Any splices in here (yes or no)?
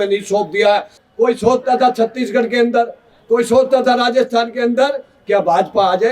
yes